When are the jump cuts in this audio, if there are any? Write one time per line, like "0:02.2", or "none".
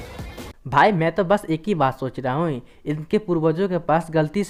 none